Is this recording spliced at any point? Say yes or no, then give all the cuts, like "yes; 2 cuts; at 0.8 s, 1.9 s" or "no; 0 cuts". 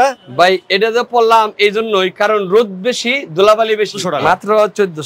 yes; 1 cut; at 4.1 s